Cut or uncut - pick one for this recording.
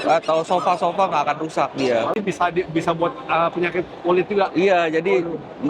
cut